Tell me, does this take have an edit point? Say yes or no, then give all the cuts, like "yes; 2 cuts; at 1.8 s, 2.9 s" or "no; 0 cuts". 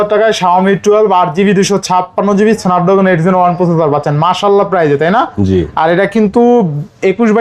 no; 0 cuts